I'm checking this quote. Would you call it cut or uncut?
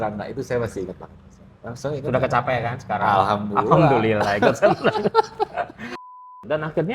cut